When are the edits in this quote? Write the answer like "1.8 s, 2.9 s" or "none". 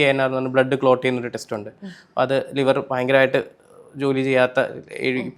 none